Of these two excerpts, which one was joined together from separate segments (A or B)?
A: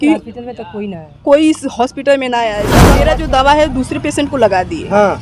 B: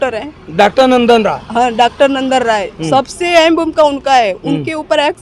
A